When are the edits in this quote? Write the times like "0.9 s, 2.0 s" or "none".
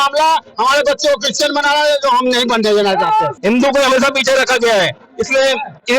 3.3 s